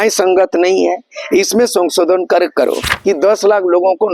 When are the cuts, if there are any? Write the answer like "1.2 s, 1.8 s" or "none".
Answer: 2.9 s